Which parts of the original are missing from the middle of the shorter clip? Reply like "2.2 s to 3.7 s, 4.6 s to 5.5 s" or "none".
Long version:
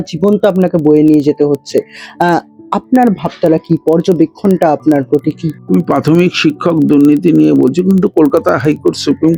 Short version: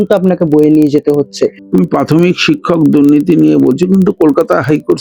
1.9 s to 5.6 s